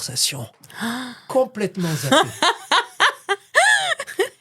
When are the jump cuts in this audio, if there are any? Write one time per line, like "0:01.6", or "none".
0:01.3